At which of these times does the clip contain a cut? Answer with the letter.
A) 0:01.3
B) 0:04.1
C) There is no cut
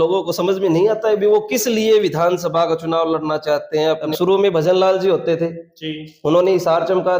B